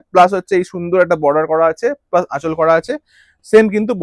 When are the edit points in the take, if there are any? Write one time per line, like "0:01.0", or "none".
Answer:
none

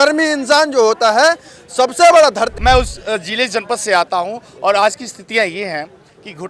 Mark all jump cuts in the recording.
0:02.5

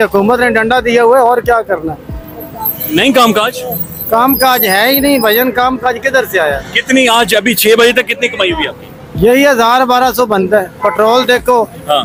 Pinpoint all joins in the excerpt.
none

